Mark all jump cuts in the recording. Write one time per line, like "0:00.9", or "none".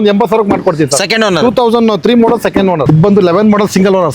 0:02.8

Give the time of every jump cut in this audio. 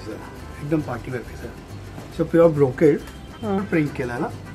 0:03.6

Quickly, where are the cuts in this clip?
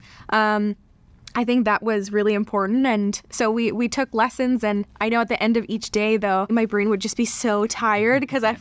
0:06.5

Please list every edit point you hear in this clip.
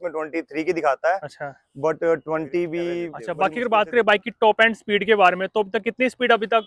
0:03.2

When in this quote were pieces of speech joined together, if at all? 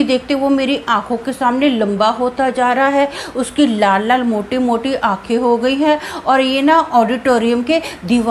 none

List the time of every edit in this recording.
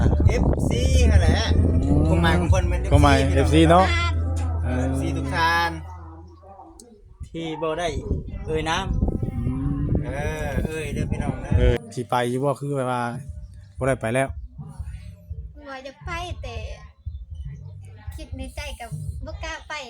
0:11.8

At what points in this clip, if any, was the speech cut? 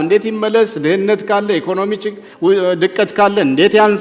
none

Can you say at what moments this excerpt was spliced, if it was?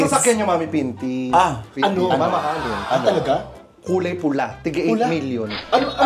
0:01.7

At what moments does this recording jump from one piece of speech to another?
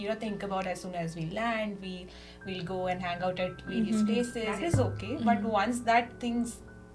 0:04.6

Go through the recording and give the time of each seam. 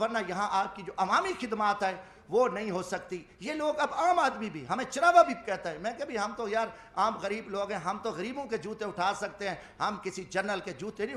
none

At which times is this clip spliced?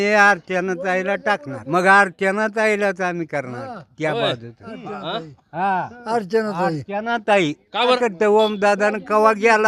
0:01.5
0:08.0

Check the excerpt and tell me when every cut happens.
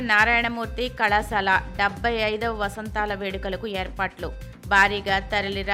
none

